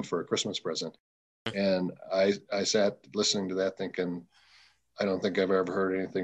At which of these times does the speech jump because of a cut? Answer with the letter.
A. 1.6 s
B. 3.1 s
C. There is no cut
C